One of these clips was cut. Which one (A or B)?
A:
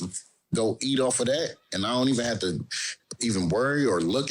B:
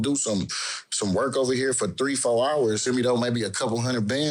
B